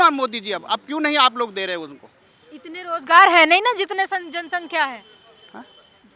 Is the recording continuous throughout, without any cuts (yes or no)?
yes